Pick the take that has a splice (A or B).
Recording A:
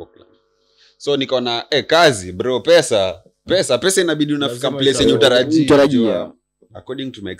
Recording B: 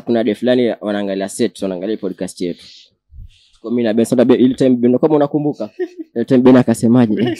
A